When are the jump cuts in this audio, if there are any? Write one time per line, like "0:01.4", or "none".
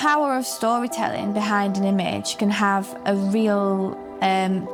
none